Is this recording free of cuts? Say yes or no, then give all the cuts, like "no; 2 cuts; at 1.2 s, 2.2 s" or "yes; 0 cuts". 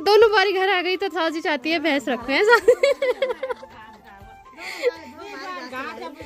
yes; 0 cuts